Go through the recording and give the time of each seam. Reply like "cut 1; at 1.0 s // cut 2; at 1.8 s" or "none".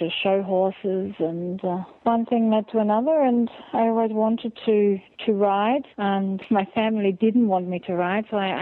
cut 1; at 1.9 s // cut 2; at 6.4 s